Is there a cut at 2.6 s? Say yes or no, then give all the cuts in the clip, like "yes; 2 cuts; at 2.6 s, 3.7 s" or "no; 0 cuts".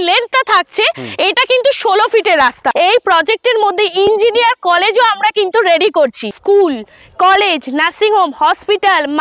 yes; 2 cuts; at 2.6 s, 6.4 s